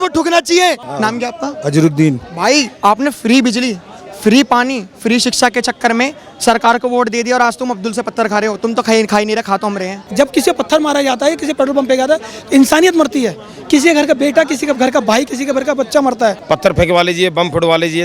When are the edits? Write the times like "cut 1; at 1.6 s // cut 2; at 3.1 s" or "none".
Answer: cut 1; at 0.9 s // cut 2; at 10.1 s // cut 3; at 16.4 s